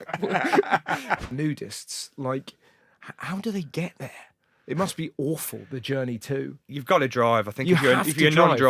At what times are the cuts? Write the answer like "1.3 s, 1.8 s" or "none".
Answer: 1.2 s